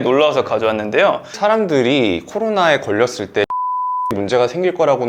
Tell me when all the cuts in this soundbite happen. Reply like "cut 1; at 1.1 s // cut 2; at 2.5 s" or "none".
cut 1; at 1.3 s